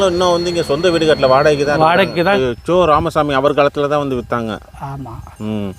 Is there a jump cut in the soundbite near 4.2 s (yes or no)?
no